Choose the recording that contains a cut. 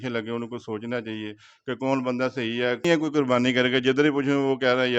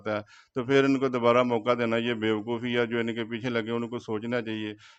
first; 1 cut; at 2.8 s

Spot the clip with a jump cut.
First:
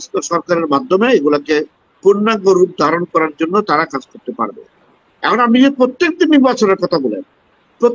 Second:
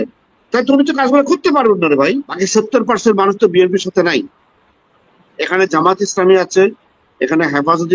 second; 1 cut; at 2.3 s

